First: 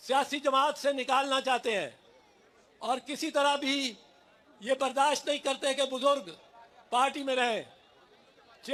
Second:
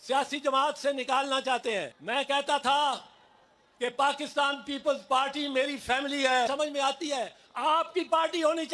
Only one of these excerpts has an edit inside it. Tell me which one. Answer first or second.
second